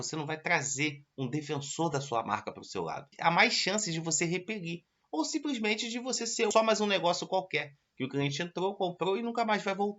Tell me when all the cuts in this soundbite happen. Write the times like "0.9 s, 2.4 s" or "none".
3.1 s, 6.5 s